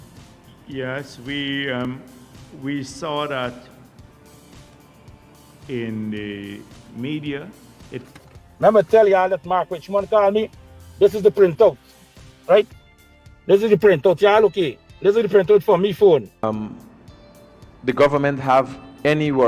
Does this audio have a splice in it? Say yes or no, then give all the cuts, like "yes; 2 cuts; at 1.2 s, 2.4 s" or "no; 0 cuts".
yes; 2 cuts; at 8.1 s, 16.4 s